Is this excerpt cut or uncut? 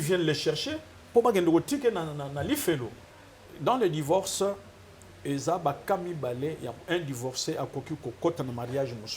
cut